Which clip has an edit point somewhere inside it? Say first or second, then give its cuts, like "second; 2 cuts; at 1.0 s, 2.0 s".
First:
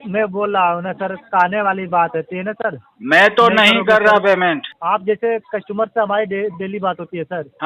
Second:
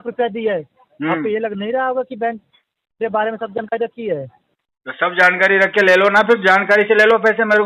first; 1 cut; at 4.7 s